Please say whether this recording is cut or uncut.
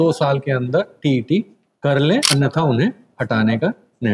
cut